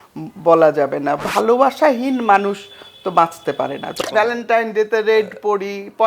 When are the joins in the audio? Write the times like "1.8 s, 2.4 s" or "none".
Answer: 1.3 s, 4.0 s